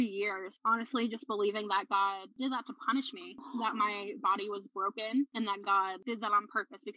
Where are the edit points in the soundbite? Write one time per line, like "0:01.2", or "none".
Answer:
none

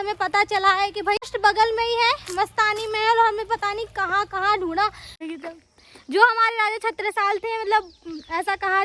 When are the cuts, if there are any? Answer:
0:01.3
0:05.2

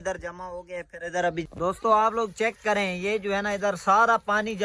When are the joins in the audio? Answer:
0:01.4

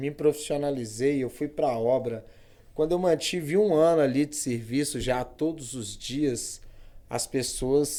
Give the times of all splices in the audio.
none

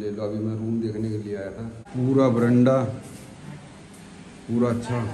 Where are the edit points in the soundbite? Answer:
0:01.8

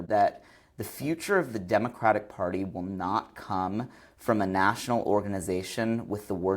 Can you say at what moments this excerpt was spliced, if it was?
none

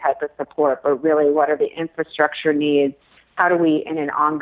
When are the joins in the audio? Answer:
none

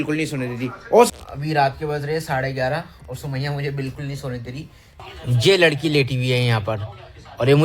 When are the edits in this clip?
0:01.1
0:05.0

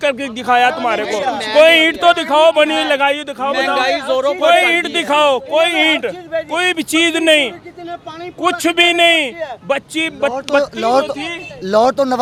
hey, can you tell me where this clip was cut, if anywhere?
none

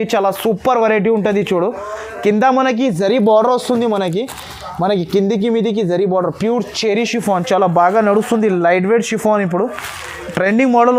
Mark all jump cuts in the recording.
none

